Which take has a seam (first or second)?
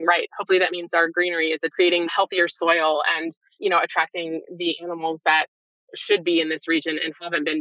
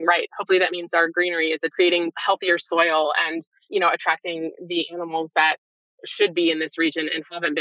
first